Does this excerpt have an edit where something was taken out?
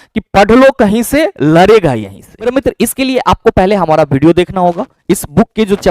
yes; 1 cut; at 2.5 s

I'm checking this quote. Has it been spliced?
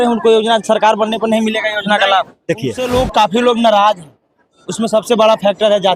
yes; 1 cut; at 2.8 s

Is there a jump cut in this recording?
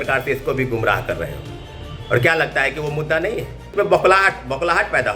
yes; 1 cut; at 3.7 s

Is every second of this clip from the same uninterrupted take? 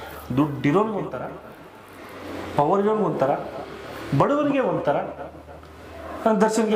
yes; 0 cuts

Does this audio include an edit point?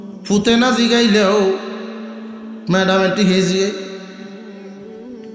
yes; 1 cut; at 4.4 s

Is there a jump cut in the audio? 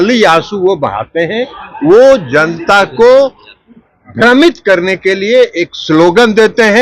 no; 0 cuts

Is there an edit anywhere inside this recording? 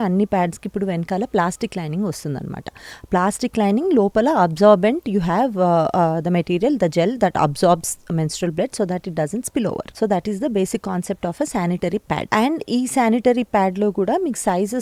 yes; 2 cuts; at 9.9 s, 12.2 s

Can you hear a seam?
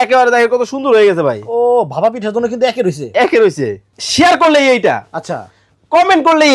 yes; 1 cut; at 4.0 s

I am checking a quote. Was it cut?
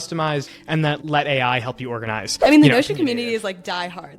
yes; 2 cuts; at 0.8 s, 2.2 s

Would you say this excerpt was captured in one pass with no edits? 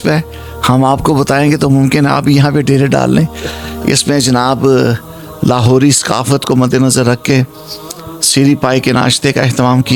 yes; 0 cuts

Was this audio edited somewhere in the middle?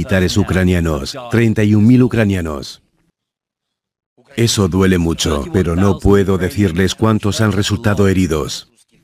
no; 0 cuts

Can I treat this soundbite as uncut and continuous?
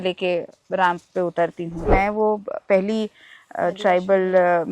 no; 1 cut; at 1.9 s

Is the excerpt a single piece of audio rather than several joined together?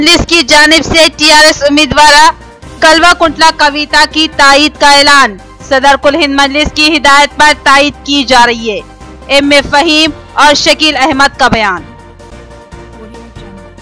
yes; 0 cuts

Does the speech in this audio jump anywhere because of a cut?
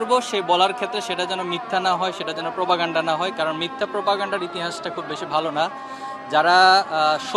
no; 0 cuts

